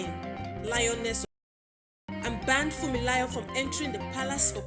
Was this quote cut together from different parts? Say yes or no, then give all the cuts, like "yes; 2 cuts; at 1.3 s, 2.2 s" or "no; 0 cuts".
yes; 1 cut; at 1.5 s